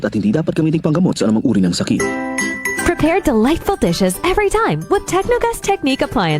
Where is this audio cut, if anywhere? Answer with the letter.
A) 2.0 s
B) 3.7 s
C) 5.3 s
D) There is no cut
A